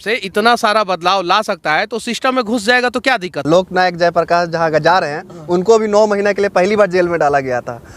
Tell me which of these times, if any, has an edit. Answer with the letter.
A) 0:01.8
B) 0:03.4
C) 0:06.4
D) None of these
B